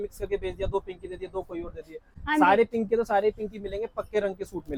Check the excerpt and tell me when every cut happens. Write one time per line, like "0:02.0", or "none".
none